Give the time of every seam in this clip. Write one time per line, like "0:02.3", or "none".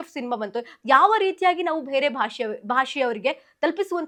none